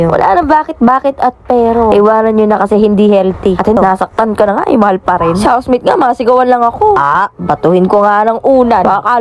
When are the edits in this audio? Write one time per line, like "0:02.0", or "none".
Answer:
0:03.8

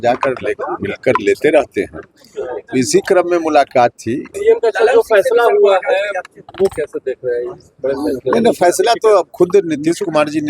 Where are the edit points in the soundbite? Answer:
0:04.3

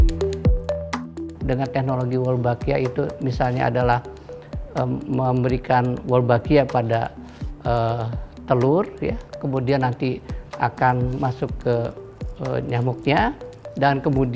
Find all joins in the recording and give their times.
0:01.2

